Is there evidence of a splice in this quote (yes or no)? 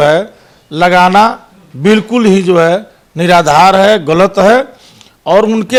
no